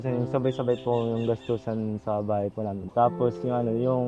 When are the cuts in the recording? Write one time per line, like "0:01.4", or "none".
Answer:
0:02.8

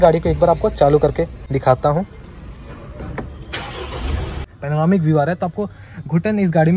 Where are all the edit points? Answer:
0:01.5
0:04.5

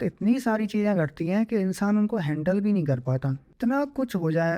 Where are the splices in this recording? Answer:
0:03.5

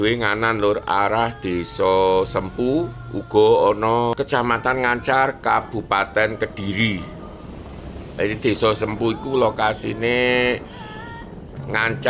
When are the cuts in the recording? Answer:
0:04.1

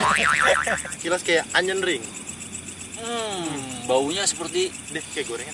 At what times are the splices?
0:00.9

